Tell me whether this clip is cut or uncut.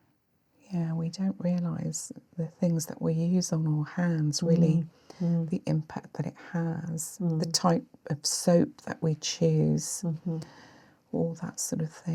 uncut